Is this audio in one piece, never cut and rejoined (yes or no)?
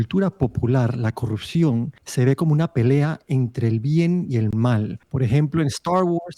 no